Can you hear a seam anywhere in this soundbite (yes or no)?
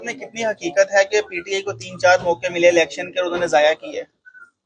no